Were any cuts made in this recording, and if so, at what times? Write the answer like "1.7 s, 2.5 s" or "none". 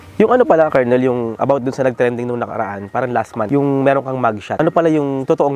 none